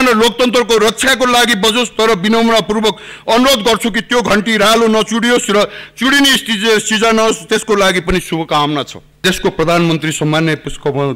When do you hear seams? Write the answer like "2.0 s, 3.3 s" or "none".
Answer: 9.2 s